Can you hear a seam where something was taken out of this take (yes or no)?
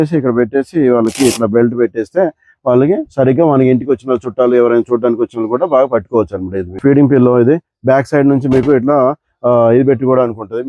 yes